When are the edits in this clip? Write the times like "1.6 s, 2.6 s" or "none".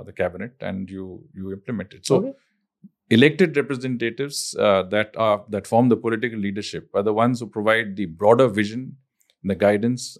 none